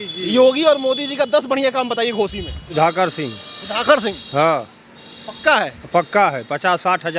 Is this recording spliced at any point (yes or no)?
yes